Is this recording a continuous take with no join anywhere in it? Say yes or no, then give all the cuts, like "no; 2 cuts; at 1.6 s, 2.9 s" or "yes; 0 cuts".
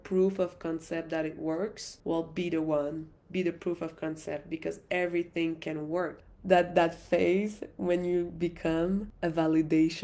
no; 3 cuts; at 1.9 s, 6.2 s, 9.1 s